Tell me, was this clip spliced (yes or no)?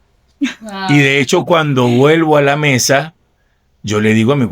no